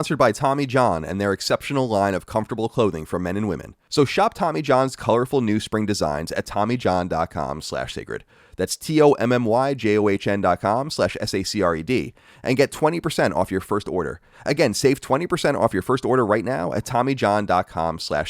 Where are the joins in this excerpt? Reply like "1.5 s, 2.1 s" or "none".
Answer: 3.7 s